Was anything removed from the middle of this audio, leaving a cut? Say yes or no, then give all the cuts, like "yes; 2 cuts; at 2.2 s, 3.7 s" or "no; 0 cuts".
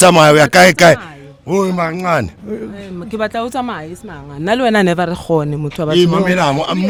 no; 0 cuts